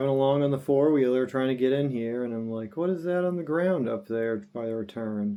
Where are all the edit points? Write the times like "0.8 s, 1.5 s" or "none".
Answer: none